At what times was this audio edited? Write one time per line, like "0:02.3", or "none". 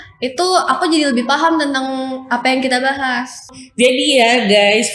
0:03.5